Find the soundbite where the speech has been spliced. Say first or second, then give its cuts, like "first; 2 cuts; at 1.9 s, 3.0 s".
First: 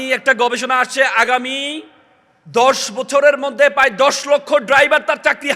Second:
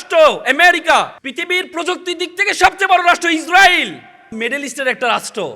second; 2 cuts; at 1.2 s, 4.3 s